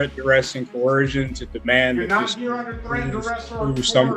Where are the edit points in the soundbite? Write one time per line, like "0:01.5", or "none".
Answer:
none